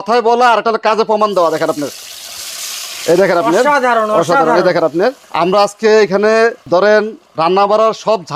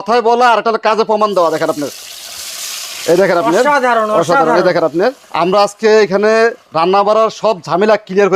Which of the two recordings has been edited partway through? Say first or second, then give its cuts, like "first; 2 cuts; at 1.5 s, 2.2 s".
second; 1 cut; at 6.6 s